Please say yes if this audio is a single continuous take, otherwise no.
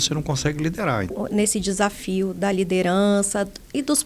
no